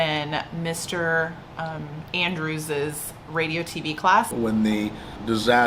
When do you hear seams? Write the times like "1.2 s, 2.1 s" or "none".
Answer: 4.3 s